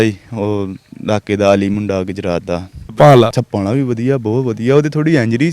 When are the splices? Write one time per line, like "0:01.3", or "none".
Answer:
0:02.9
0:03.4